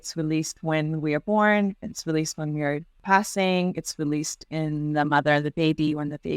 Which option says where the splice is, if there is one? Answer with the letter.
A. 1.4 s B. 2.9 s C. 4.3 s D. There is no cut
B